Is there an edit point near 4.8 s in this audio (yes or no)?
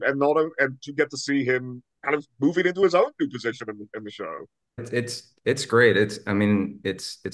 yes